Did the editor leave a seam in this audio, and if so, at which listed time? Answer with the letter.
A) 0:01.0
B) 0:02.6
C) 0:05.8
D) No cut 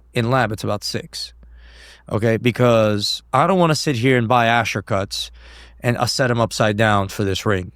D